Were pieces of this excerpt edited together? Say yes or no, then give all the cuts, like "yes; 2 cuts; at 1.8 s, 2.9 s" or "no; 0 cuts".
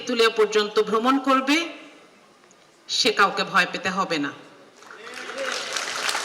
no; 0 cuts